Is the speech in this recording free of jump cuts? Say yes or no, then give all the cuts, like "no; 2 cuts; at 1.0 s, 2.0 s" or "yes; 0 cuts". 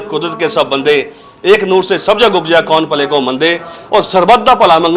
yes; 0 cuts